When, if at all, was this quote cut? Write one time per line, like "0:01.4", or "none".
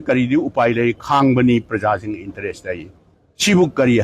none